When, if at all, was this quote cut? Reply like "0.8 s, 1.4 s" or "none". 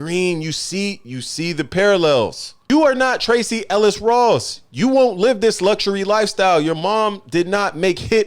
2.6 s